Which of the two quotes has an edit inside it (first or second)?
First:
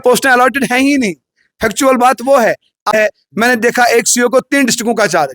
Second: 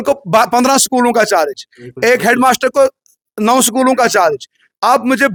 first